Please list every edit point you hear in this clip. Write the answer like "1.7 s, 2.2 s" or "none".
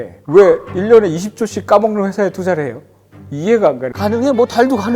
3.9 s